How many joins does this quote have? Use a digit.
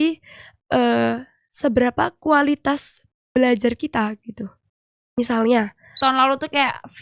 1